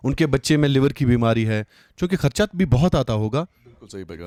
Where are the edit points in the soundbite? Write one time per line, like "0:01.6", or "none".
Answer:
none

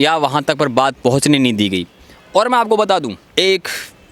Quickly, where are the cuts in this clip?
0:03.2

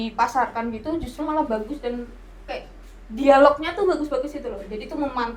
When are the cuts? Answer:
none

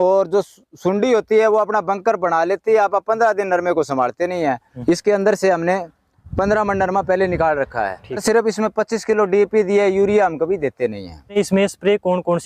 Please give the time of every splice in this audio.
0:04.7
0:08.2
0:11.3

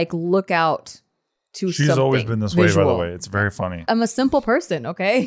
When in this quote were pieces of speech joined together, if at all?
0:03.9

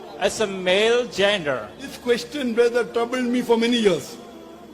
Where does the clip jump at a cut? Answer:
0:01.9

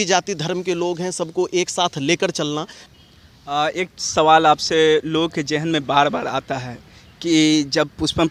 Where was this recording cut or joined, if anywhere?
none

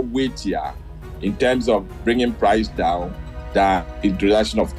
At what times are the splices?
none

